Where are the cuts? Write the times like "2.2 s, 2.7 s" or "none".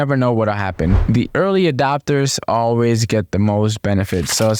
1.0 s

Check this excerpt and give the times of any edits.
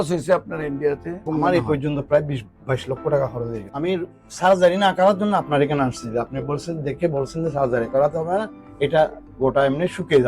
1.2 s, 3.6 s

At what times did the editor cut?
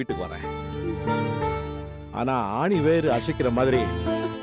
none

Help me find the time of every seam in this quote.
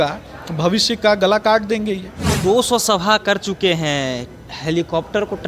2.4 s

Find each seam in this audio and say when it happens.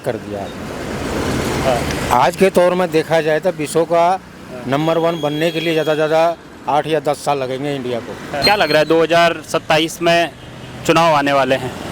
8.4 s

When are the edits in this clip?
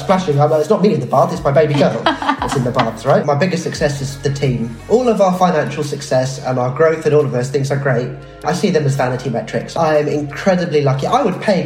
3.2 s, 4.8 s, 8.4 s

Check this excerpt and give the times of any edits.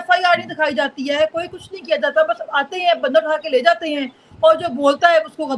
none

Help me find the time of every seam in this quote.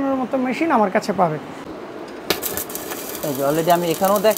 1.7 s

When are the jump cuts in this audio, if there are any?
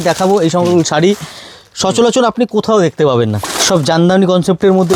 3.4 s

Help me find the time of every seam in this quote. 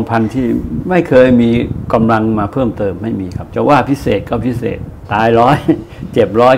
3.4 s, 4.9 s

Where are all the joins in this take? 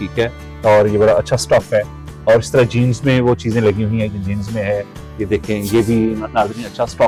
none

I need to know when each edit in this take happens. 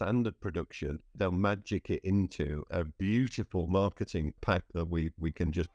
1.1 s, 2.7 s, 4.4 s

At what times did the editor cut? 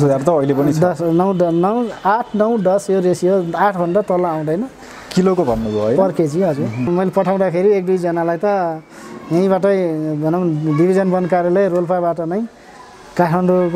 6.9 s

